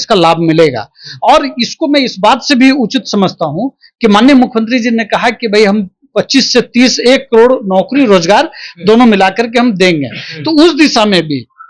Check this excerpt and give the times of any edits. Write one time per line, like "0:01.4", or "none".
none